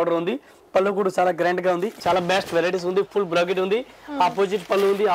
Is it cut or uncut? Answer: cut